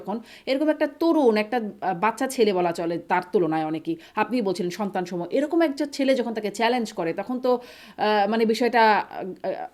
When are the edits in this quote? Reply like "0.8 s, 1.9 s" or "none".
none